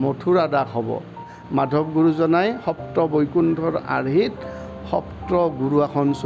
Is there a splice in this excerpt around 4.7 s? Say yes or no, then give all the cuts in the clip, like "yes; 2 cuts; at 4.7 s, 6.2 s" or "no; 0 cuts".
no; 1 cut; at 1.3 s